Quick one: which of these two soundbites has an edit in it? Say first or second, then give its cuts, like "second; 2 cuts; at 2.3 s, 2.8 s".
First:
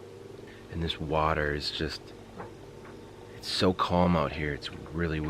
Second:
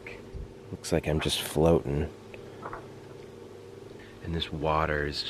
first; 1 cut; at 3.2 s